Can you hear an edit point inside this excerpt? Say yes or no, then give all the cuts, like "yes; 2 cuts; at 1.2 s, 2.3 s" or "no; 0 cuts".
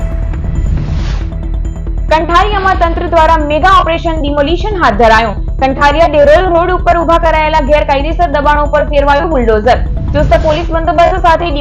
no; 0 cuts